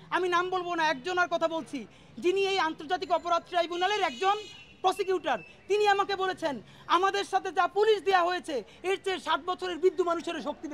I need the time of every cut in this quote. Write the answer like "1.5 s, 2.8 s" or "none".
none